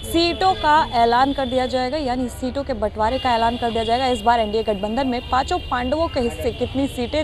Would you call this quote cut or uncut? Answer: uncut